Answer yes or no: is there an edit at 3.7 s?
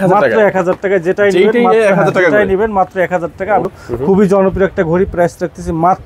yes